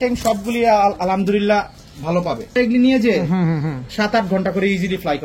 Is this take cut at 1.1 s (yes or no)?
no